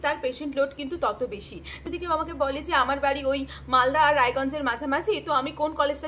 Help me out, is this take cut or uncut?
cut